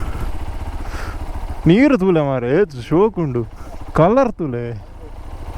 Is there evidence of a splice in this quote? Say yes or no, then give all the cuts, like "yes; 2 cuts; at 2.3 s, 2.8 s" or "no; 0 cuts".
no; 0 cuts